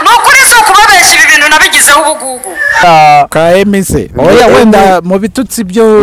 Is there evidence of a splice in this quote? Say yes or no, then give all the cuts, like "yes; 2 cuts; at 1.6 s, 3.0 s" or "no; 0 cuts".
yes; 1 cut; at 2.8 s